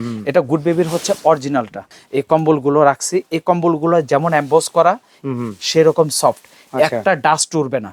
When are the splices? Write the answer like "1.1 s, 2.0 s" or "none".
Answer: 2.0 s